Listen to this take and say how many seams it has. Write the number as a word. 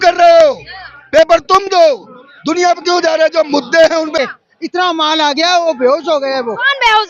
one